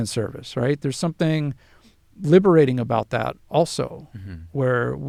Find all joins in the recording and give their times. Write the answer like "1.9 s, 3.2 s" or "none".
none